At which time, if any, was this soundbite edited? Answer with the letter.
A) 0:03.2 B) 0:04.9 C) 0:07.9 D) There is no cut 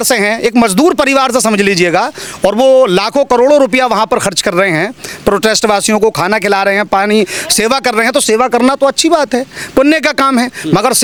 D